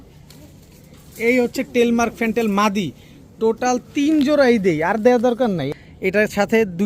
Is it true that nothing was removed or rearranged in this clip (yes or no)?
no